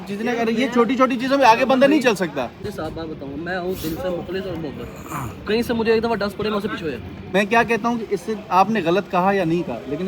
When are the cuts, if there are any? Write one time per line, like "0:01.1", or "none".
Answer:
0:02.6
0:07.3